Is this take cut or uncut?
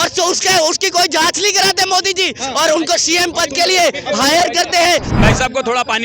cut